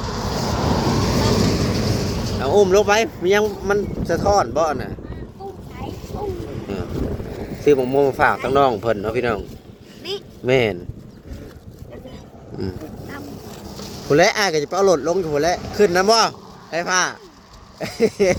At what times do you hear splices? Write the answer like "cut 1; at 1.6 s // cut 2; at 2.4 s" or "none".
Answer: none